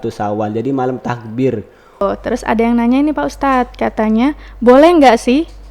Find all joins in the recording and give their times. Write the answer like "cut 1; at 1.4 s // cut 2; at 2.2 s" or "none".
cut 1; at 2.0 s

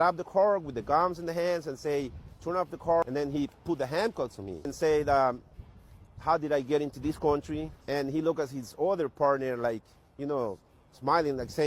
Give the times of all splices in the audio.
cut 1; at 3.0 s // cut 2; at 4.7 s // cut 3; at 7.7 s

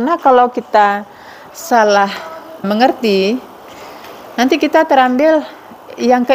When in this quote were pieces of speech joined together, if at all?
cut 1; at 2.7 s

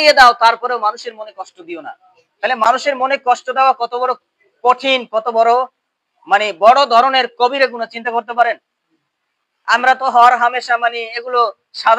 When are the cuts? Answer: none

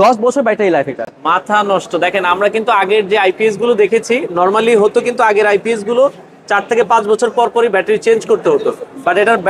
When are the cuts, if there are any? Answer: none

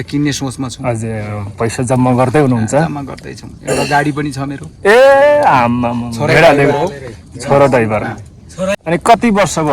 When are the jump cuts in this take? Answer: cut 1; at 8.8 s

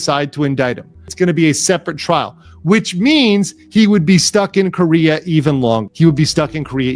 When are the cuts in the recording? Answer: cut 1; at 1.0 s // cut 2; at 5.9 s

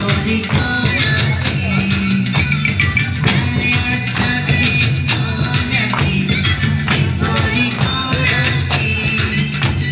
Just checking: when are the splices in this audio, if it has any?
none

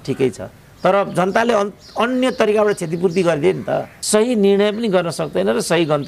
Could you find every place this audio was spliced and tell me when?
cut 1; at 3.9 s

